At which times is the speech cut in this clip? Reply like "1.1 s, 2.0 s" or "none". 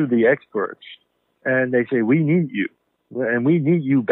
none